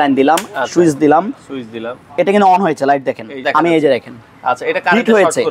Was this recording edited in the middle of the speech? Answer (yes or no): yes